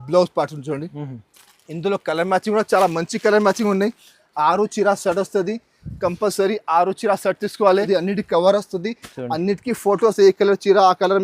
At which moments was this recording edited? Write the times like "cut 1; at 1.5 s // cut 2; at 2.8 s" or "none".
cut 1; at 7.9 s